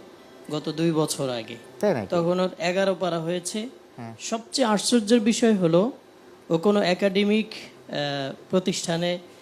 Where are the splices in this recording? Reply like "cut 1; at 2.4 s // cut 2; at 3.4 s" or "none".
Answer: none

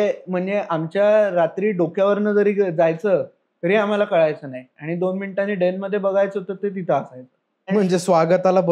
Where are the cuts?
cut 1; at 7.7 s

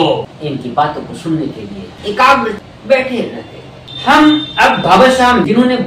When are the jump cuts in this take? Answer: none

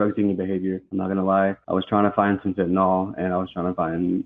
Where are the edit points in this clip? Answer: cut 1; at 0.8 s // cut 2; at 1.6 s

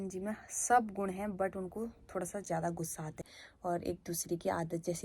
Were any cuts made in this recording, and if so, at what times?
cut 1; at 3.1 s

